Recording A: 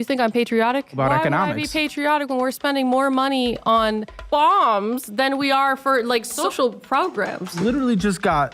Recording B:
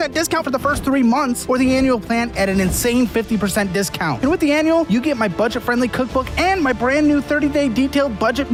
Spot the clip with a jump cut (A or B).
A